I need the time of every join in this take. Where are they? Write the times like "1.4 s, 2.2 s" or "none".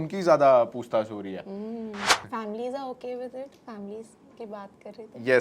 2.1 s